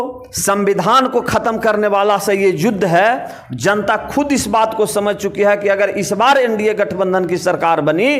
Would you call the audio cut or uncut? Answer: uncut